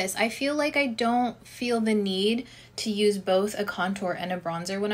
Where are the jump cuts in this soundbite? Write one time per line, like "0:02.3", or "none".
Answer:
none